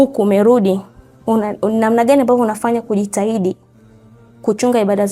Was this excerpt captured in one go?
yes; 0 cuts

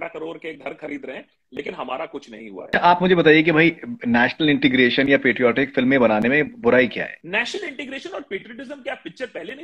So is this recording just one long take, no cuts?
no; 2 cuts; at 2.7 s, 7.2 s

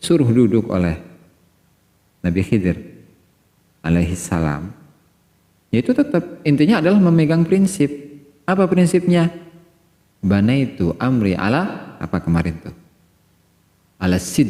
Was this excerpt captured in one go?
yes; 0 cuts

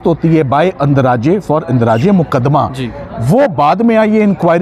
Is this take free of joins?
yes; 0 cuts

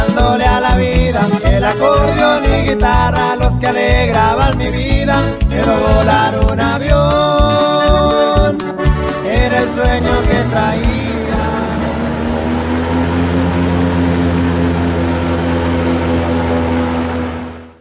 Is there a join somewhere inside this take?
no; 0 cuts

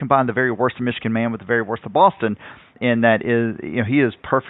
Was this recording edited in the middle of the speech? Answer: yes; 1 cut; at 2.8 s

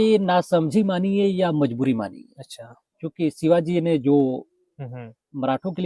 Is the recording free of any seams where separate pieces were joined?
yes; 0 cuts

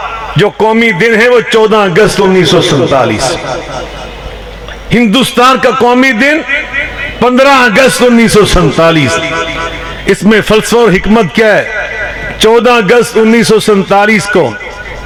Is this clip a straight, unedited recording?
yes; 0 cuts

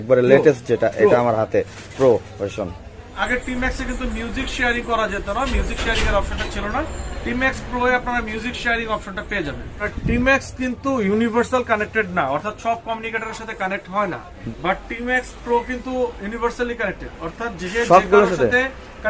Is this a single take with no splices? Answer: no; 3 cuts; at 3.2 s, 9.9 s, 14.4 s

